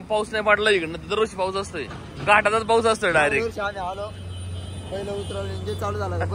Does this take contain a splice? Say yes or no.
no